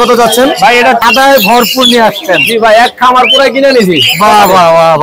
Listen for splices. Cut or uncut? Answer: cut